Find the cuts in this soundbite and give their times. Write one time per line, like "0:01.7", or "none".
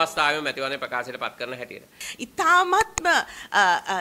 0:02.0